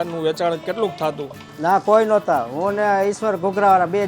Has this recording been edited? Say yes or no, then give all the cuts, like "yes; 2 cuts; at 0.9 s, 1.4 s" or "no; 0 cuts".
yes; 1 cut; at 1.5 s